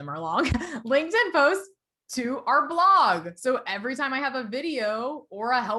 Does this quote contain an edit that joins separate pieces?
no; 0 cuts

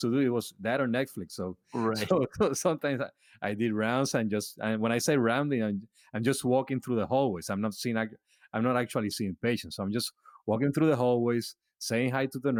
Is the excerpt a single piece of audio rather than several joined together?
yes; 0 cuts

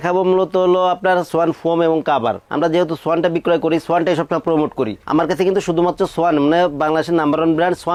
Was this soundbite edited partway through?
no; 0 cuts

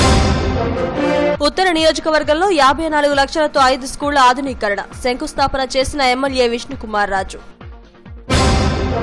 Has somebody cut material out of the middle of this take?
yes; 1 cut; at 1.5 s

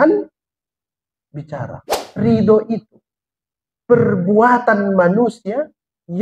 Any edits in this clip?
yes; 1 cut; at 2.0 s

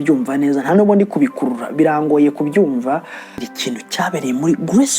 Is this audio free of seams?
no; 1 cut; at 3.5 s

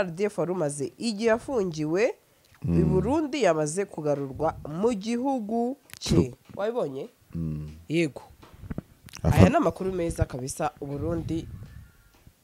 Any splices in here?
no; 0 cuts

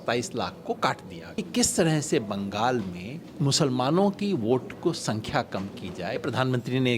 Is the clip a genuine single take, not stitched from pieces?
no; 3 cuts; at 1.4 s, 3.2 s, 6.2 s

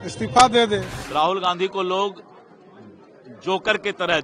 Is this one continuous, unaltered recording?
no; 1 cut; at 1.0 s

